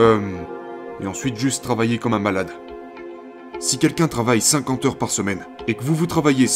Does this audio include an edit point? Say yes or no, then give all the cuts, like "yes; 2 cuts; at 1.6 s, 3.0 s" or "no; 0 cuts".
yes; 2 cuts; at 3.1 s, 5.5 s